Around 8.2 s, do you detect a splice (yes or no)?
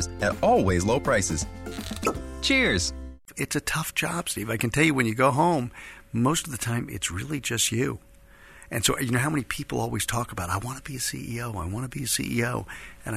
no